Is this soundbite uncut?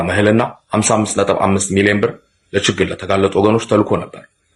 yes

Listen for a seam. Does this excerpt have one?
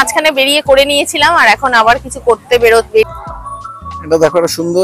yes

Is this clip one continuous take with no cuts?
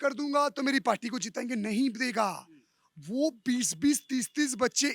yes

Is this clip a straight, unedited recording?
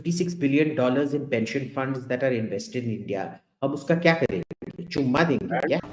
yes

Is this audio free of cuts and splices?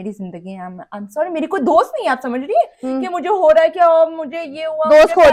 yes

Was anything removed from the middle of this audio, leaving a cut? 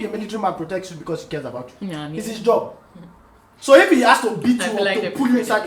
no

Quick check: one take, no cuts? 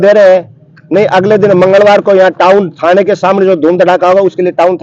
yes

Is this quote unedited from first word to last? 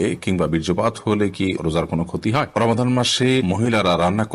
no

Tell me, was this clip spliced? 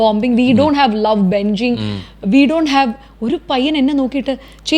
no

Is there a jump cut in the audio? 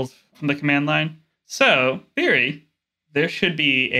yes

